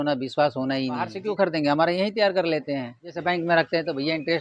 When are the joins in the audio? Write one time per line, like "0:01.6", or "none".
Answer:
0:01.2
0:02.9